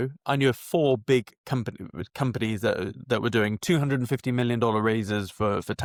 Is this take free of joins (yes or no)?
yes